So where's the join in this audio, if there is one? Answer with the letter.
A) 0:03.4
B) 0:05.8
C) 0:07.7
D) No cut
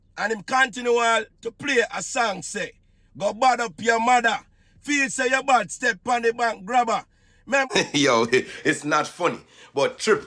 C